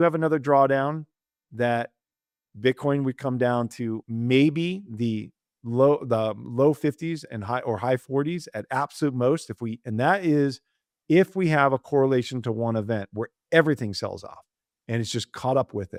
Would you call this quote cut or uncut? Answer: uncut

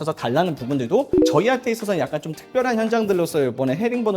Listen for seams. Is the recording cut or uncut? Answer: cut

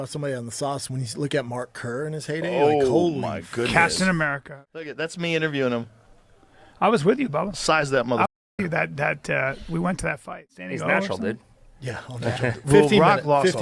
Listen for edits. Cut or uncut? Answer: cut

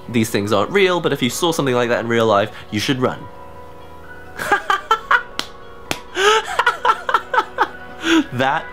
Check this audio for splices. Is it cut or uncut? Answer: uncut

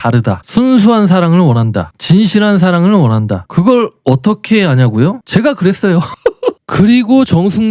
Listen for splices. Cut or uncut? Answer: cut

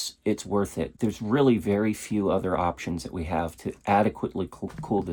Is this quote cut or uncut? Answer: uncut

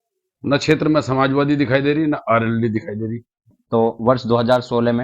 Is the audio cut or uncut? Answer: cut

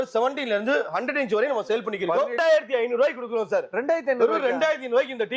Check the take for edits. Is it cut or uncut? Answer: cut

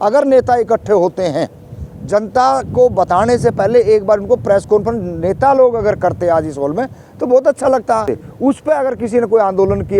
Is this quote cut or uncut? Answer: cut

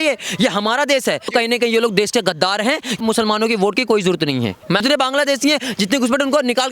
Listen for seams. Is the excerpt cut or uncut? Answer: cut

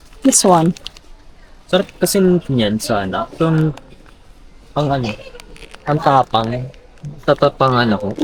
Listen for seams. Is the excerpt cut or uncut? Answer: uncut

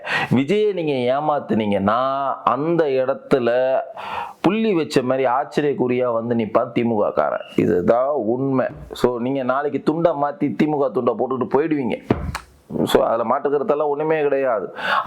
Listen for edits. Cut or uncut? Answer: uncut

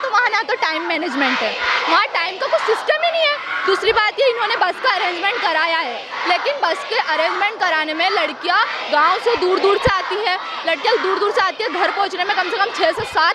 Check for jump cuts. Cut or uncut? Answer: uncut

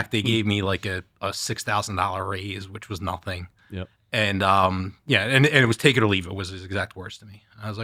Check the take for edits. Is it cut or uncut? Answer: uncut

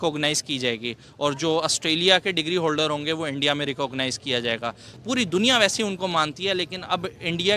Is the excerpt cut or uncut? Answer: cut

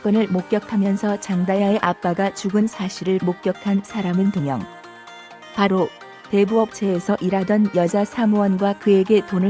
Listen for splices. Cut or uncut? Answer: uncut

